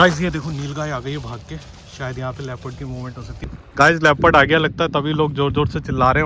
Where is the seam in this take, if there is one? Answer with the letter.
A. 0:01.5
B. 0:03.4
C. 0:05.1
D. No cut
B